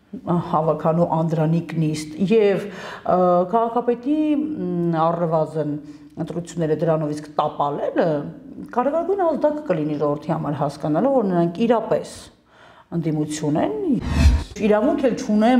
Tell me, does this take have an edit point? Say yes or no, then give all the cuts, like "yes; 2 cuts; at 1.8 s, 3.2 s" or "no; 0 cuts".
yes; 1 cut; at 14.0 s